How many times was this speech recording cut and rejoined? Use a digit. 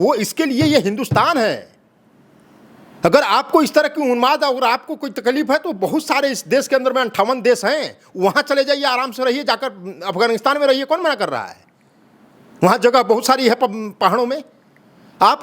0